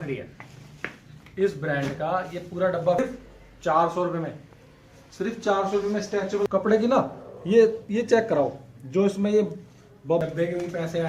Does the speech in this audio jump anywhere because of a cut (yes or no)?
yes